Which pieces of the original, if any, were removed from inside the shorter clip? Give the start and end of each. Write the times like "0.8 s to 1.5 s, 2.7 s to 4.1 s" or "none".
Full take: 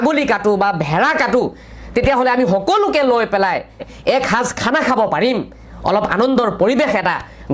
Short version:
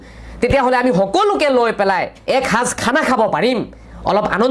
3.7 s to 3.9 s